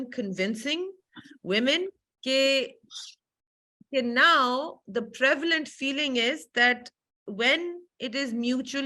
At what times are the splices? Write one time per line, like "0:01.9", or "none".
0:02.1